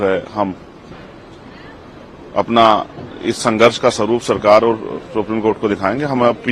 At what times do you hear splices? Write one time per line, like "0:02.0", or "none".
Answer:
none